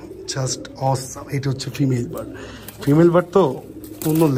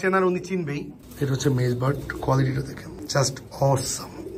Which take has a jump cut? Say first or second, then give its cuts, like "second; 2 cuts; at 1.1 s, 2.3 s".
second; 2 cuts; at 1.0 s, 2.9 s